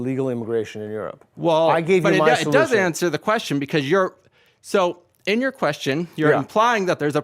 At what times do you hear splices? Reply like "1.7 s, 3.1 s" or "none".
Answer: none